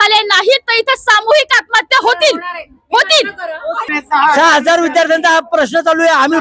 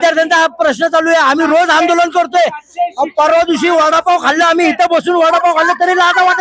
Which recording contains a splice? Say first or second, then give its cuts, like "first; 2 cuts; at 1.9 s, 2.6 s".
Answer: first; 1 cut; at 3.9 s